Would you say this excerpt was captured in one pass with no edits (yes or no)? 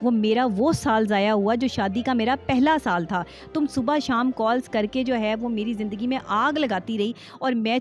yes